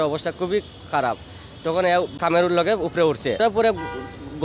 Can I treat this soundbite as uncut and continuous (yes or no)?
no